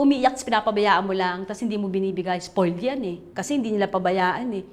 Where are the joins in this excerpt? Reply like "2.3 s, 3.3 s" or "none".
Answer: 3.3 s